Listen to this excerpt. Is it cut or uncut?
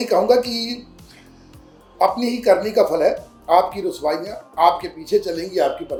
uncut